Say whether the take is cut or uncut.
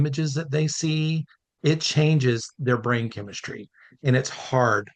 cut